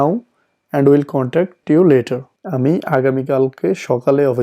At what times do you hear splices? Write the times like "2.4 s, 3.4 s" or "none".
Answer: 1.6 s, 2.4 s